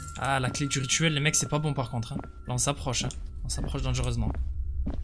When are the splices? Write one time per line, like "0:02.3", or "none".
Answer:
0:02.4
0:03.1